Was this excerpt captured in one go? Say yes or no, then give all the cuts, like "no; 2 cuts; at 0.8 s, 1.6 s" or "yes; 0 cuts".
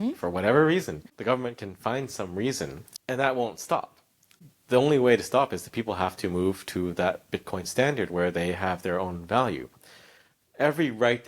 no; 3 cuts; at 1.0 s, 2.9 s, 4.3 s